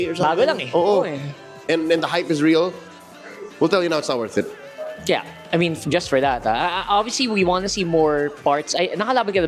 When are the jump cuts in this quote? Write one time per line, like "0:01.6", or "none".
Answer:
none